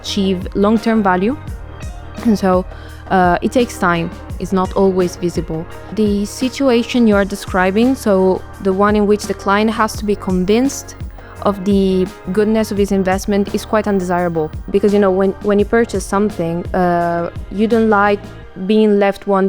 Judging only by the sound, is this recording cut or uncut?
cut